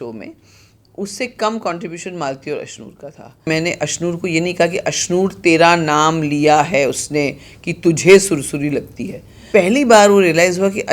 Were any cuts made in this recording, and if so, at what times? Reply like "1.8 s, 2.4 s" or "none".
3.4 s, 9.3 s